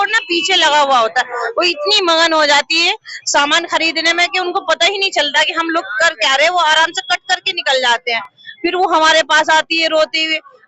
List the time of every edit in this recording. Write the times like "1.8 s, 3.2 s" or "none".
none

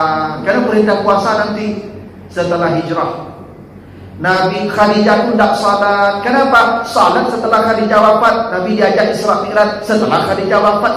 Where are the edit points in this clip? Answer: none

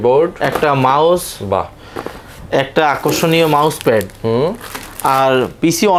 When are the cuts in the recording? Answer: none

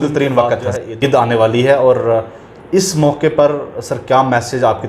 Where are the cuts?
0.9 s

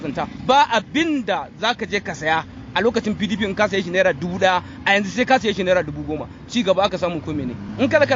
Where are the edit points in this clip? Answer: none

